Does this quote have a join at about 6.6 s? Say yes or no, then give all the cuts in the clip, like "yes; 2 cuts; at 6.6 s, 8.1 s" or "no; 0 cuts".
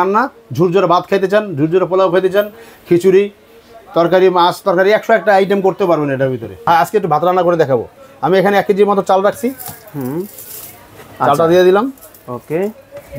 yes; 1 cut; at 6.6 s